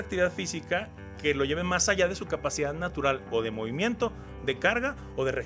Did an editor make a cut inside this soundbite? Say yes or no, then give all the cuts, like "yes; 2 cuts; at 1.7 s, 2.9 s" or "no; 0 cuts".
no; 0 cuts